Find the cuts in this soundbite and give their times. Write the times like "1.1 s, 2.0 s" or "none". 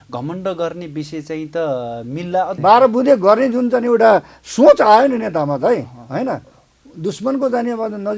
2.5 s